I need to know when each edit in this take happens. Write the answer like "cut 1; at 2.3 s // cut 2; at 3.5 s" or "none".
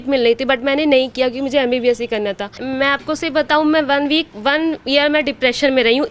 cut 1; at 2.6 s